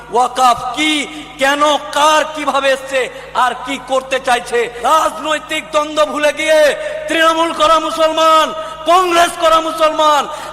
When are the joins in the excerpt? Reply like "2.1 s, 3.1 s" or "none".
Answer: 4.7 s